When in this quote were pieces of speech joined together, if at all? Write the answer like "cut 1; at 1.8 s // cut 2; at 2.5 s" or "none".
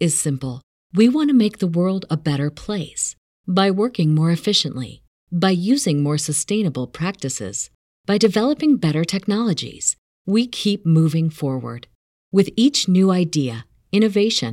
none